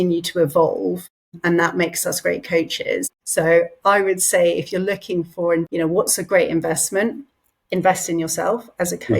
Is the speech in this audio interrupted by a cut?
yes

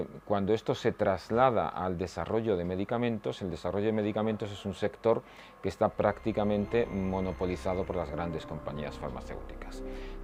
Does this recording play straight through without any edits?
yes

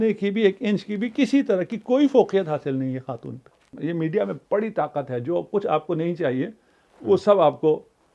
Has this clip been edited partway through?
yes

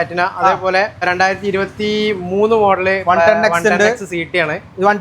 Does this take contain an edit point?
yes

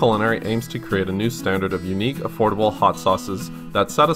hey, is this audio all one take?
yes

